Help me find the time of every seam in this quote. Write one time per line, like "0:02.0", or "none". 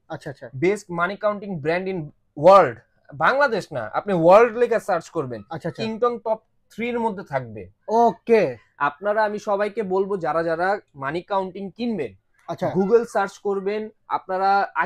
none